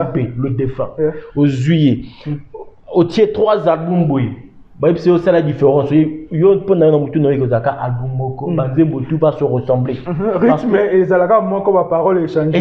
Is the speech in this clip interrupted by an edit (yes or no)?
no